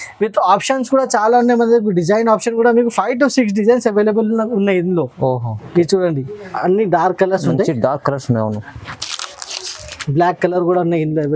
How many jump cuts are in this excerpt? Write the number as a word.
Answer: one